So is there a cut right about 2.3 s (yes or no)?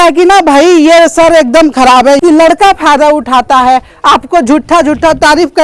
yes